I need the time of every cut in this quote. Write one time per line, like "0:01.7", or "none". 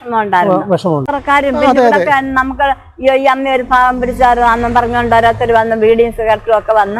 0:01.0